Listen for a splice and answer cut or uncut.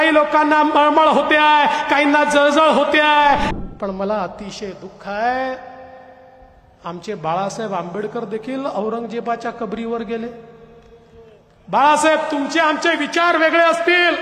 cut